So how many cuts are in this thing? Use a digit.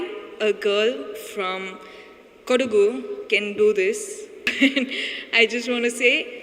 1